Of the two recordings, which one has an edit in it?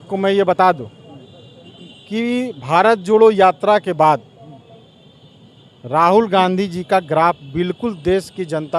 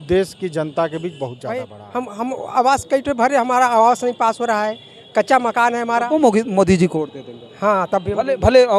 second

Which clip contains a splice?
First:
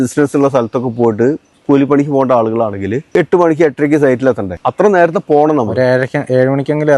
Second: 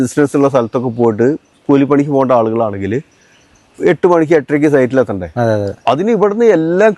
first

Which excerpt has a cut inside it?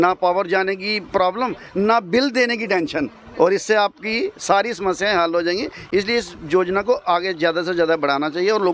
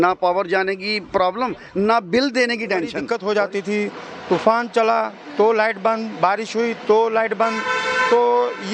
second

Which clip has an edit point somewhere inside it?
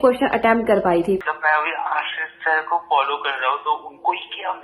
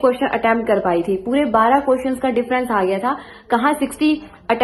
first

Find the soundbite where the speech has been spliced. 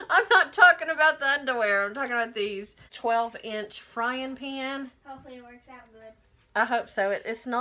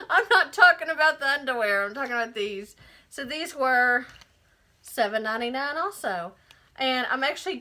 first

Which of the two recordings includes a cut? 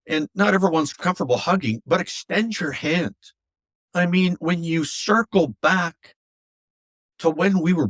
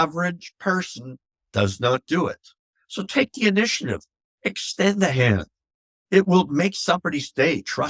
first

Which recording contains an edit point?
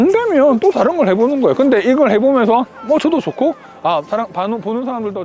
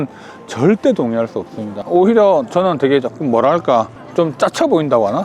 second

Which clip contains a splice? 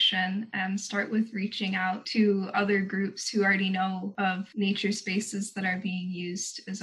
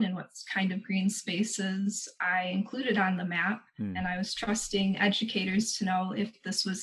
first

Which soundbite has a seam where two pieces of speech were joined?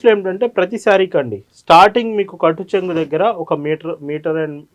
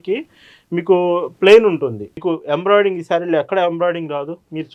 second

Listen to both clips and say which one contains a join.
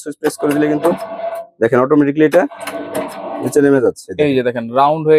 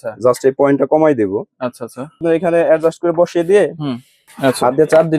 second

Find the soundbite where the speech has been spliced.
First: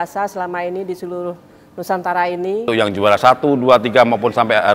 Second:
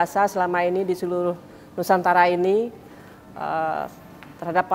first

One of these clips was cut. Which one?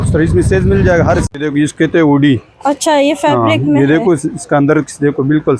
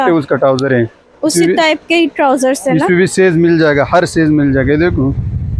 first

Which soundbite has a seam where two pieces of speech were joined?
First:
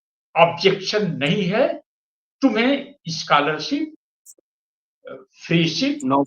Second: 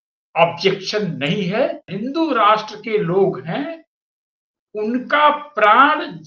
second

